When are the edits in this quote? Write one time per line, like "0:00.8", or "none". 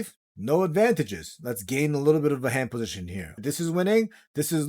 0:03.4